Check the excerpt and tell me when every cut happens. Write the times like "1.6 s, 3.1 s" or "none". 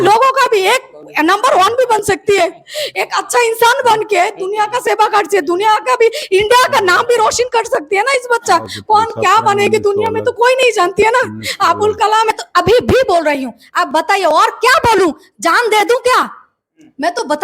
12.3 s